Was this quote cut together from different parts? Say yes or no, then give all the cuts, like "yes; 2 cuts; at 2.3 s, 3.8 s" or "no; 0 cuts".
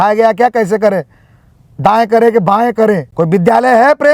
yes; 1 cut; at 3.1 s